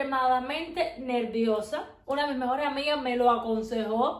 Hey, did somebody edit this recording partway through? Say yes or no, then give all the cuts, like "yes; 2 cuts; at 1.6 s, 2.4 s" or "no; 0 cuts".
no; 0 cuts